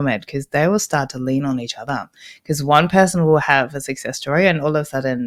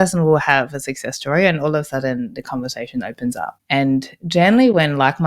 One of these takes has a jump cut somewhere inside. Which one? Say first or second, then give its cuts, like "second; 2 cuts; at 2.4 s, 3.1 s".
second; 1 cut; at 3.5 s